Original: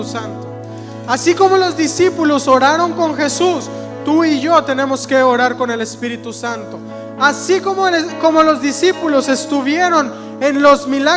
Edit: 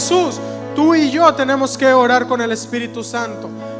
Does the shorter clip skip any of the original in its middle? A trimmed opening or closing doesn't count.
no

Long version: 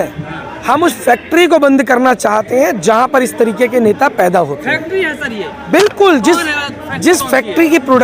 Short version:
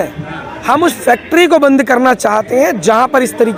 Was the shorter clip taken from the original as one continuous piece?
yes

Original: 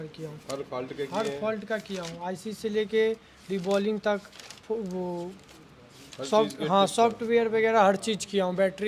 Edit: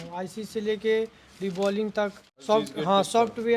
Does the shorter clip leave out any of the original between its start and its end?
yes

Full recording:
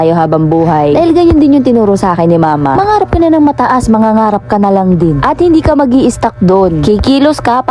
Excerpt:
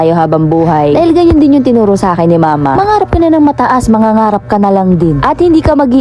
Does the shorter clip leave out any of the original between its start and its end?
no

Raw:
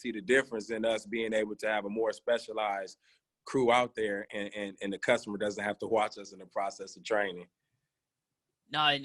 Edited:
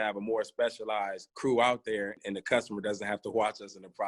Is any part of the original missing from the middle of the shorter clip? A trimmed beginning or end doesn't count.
yes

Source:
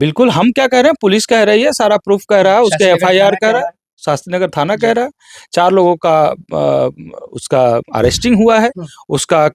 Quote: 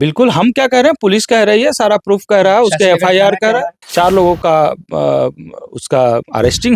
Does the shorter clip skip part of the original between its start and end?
yes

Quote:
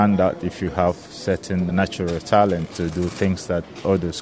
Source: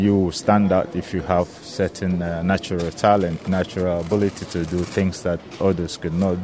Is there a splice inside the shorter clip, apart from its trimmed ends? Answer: yes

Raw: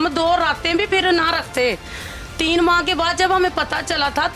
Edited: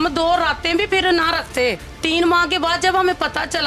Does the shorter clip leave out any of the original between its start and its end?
yes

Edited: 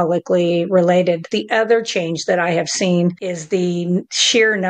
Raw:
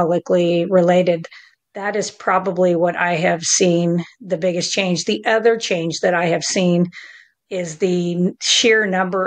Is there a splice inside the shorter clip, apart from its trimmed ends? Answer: yes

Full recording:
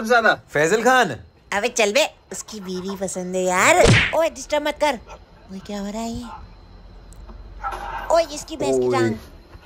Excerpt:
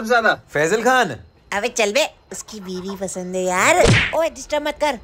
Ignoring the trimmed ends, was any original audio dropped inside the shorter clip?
no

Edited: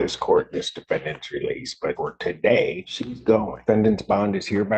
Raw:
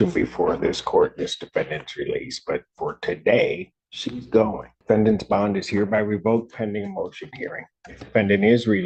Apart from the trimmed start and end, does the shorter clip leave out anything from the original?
yes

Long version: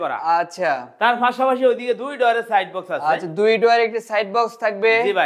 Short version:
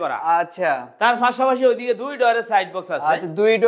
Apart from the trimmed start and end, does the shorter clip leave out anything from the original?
no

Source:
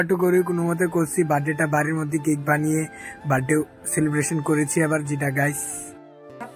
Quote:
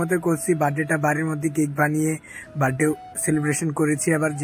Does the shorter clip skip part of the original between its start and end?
no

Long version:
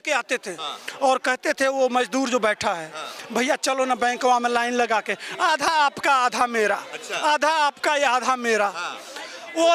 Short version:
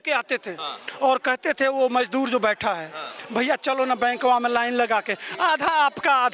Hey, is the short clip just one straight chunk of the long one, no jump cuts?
yes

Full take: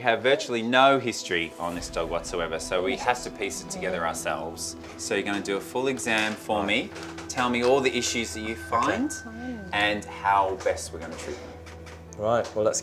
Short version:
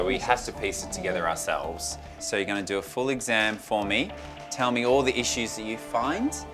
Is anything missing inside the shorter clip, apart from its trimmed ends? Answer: no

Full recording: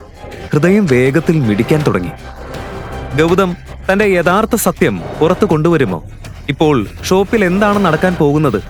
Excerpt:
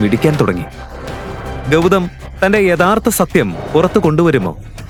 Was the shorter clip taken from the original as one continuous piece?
yes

